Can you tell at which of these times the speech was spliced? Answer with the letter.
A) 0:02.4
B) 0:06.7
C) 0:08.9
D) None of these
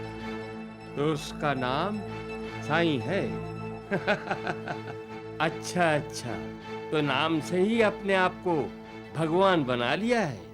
D